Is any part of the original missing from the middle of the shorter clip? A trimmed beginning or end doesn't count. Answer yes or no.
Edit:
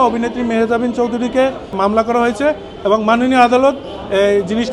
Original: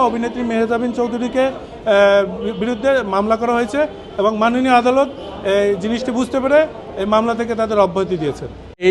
yes